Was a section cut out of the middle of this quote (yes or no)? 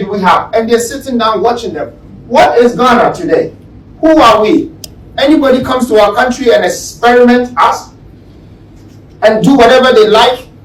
no